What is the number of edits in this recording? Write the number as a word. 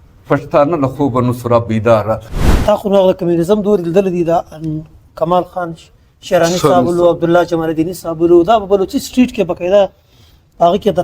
one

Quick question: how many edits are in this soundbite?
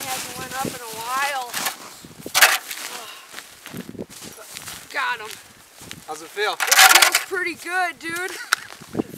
zero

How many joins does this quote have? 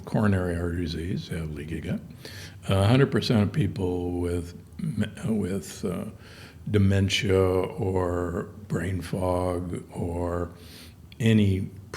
zero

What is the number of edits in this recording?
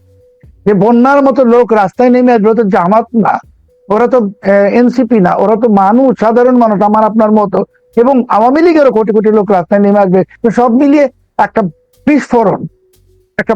one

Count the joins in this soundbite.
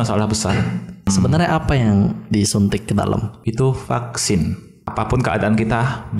three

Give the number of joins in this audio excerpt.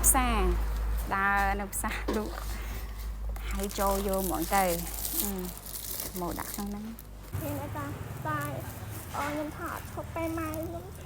one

